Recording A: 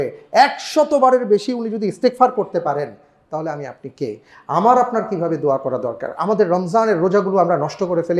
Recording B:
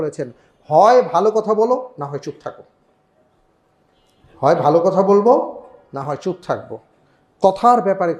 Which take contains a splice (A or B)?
A